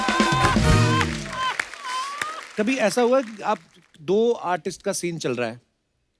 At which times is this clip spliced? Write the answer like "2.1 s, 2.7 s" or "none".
2.4 s